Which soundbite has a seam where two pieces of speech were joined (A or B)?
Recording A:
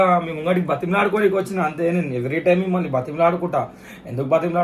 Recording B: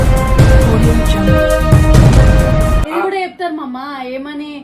B